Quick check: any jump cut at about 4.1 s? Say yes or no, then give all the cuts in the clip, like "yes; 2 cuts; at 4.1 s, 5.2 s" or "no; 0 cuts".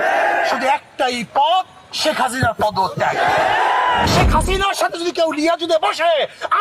yes; 1 cut; at 4.1 s